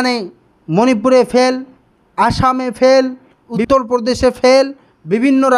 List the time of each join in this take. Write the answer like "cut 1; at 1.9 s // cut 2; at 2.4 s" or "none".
cut 1; at 3.6 s